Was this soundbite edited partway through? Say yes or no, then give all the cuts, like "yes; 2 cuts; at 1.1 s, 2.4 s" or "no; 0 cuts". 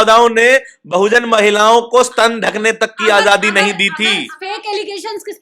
yes; 1 cut; at 4.3 s